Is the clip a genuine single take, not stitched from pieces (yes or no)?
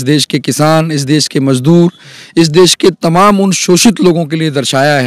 yes